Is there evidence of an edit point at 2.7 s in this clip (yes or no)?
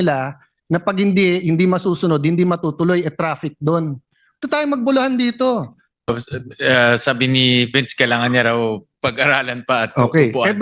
no